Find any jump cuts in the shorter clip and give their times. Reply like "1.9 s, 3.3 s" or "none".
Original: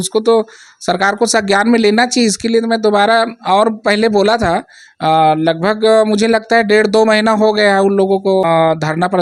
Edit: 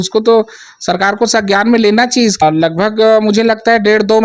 2.4 s

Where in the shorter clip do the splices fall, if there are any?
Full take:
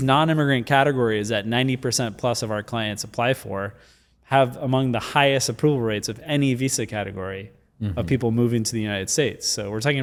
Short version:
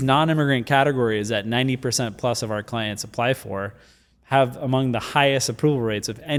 none

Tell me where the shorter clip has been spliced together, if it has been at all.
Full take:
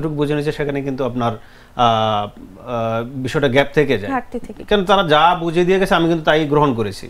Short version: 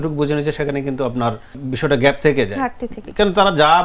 1.6 s

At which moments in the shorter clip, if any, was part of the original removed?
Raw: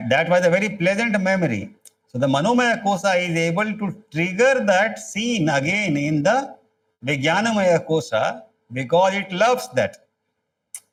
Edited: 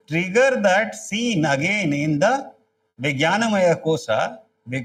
none

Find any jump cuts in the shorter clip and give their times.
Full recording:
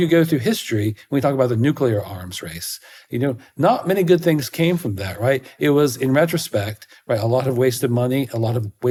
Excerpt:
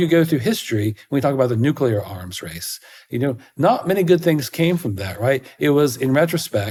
none

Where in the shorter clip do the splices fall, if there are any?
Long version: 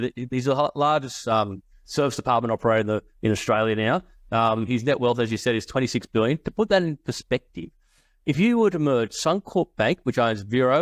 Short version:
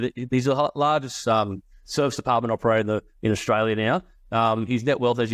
none

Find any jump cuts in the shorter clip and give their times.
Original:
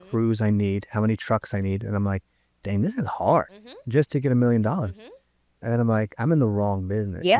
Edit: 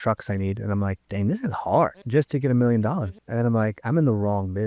1.0 s, 2.0 s, 3.2 s

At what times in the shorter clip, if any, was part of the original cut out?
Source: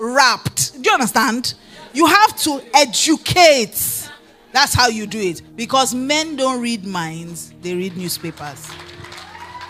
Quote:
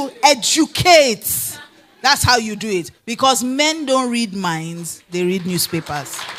none

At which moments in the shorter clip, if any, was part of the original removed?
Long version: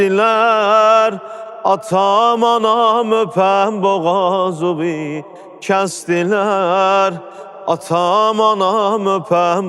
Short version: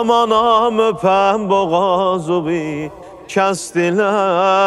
none

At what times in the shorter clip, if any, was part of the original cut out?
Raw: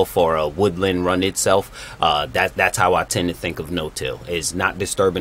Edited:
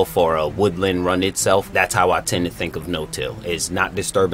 1.7 s

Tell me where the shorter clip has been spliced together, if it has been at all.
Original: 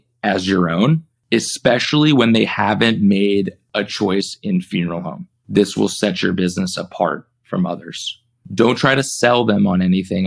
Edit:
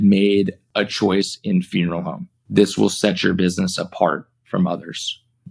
none

